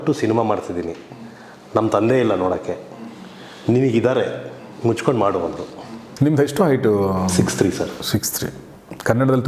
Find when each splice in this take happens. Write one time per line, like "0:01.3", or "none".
0:05.6